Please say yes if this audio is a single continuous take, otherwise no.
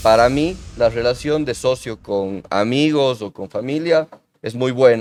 yes